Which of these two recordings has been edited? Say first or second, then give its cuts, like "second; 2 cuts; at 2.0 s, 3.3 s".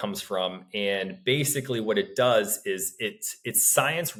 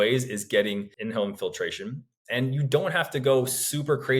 second; 1 cut; at 0.9 s